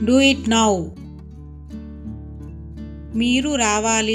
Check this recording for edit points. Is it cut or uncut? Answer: cut